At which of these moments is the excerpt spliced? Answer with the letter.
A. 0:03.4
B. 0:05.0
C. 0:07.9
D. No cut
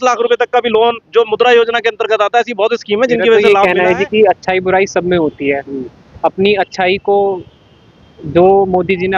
A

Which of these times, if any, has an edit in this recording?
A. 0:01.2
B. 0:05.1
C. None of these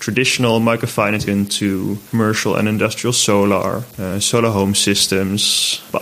A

